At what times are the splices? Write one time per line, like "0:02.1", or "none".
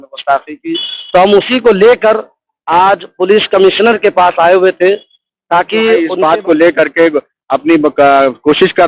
0:06.1